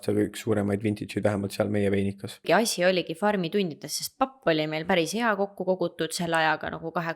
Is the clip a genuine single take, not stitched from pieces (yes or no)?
no